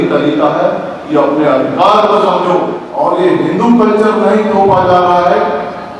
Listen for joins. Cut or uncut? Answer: cut